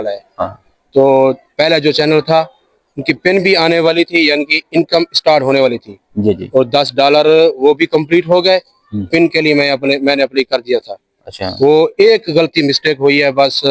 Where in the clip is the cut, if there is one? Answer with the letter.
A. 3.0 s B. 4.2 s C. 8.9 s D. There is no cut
D